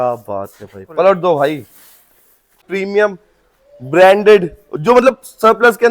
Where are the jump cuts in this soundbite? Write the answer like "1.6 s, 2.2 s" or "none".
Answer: 2.6 s